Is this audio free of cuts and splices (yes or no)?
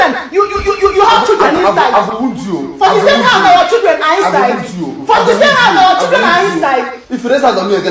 yes